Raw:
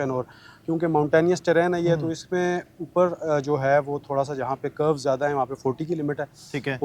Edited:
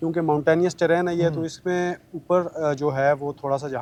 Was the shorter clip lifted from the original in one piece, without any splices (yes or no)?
yes